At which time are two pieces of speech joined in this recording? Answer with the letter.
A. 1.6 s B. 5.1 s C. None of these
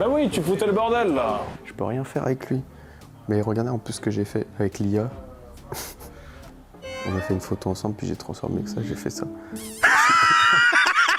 A